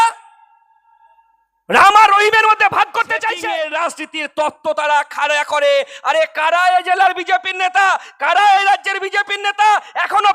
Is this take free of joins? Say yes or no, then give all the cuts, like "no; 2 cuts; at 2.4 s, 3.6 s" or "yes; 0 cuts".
no; 1 cut; at 3.3 s